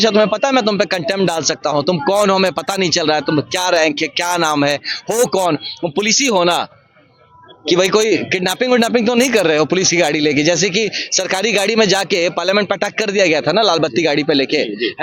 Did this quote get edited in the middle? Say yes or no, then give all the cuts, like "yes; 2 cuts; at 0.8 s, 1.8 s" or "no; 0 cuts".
no; 0 cuts